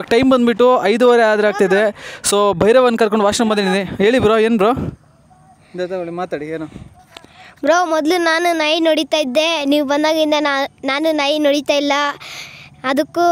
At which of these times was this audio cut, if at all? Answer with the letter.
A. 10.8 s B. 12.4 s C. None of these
C